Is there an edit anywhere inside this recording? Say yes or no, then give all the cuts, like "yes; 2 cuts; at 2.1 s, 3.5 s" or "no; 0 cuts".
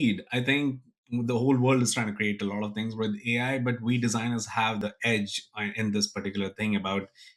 yes; 1 cut; at 4.8 s